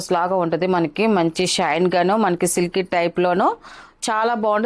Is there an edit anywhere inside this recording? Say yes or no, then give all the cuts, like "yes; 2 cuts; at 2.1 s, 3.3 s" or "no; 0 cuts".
no; 0 cuts